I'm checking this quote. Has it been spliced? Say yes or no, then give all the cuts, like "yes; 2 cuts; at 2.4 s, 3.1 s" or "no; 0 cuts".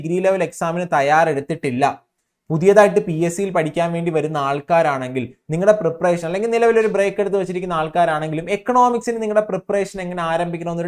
no; 0 cuts